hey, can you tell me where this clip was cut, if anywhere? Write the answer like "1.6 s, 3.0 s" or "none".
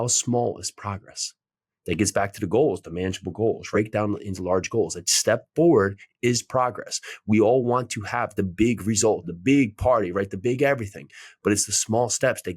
3.7 s, 9.3 s